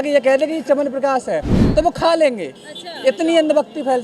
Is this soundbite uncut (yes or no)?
yes